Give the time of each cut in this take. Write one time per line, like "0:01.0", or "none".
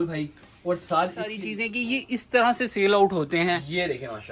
0:01.4